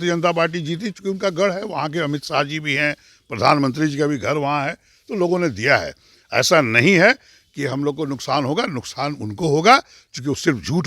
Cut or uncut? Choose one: uncut